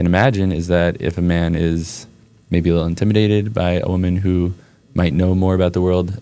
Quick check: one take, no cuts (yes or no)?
yes